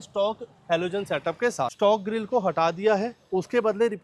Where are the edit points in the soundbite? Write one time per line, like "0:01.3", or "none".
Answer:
0:01.7